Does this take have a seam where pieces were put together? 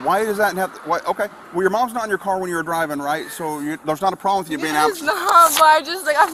no; 0 cuts

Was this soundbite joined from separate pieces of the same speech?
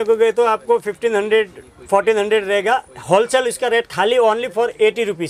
no; 0 cuts

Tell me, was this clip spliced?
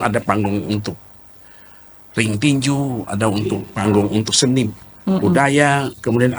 no; 0 cuts

